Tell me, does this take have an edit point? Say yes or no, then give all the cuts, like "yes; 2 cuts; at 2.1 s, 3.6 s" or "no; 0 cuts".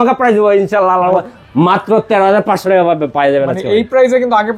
yes; 1 cut; at 1.2 s